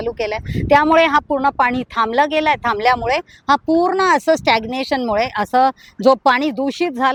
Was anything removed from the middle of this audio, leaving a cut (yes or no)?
no